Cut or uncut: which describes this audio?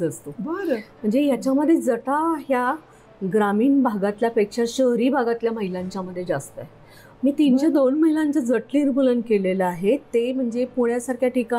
uncut